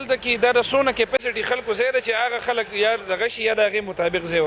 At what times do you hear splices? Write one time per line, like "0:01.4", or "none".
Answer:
none